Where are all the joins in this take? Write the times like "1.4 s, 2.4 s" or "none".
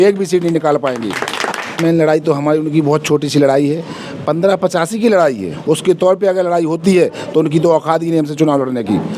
1.8 s, 5.5 s